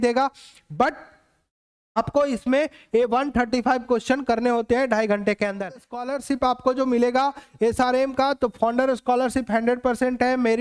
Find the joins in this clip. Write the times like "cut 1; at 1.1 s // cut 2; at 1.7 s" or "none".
cut 1; at 6.0 s